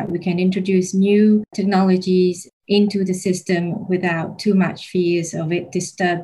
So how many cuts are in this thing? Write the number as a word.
one